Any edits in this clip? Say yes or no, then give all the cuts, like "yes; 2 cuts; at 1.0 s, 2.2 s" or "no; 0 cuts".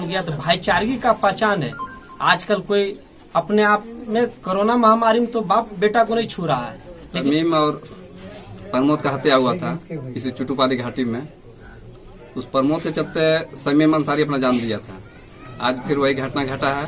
yes; 1 cut; at 7.1 s